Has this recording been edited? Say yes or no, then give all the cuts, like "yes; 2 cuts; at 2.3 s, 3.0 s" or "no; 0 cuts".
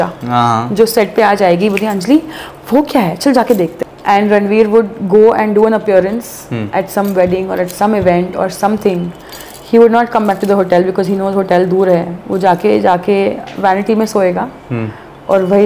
yes; 1 cut; at 3.8 s